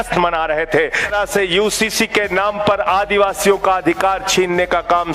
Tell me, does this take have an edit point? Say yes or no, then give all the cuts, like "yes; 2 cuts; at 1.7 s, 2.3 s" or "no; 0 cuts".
yes; 1 cut; at 1.1 s